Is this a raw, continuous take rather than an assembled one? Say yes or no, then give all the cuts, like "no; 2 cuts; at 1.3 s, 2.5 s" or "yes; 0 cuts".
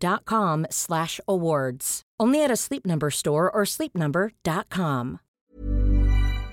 no; 1 cut; at 5.5 s